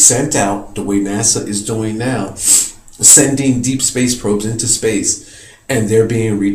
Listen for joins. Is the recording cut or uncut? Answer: cut